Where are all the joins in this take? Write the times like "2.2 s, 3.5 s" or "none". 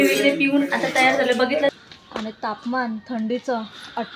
1.7 s